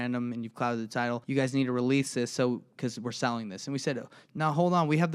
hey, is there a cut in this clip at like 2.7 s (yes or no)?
no